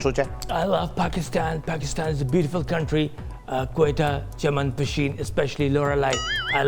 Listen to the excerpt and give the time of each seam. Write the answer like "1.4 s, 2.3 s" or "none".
none